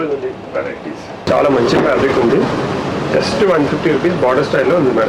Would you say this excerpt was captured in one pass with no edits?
no; 1 cut; at 1.3 s

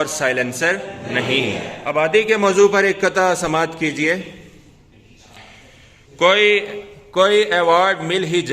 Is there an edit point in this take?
yes; 1 cut; at 1.7 s

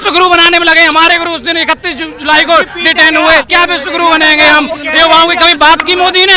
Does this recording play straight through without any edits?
yes; 0 cuts

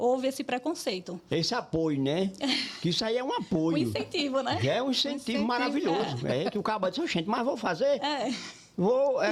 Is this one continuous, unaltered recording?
yes; 0 cuts

